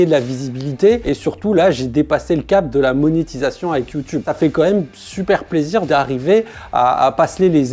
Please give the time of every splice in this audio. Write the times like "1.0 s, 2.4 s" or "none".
1.0 s